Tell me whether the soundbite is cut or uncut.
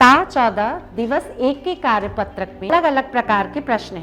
cut